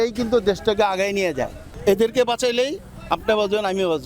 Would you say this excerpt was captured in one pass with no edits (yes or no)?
yes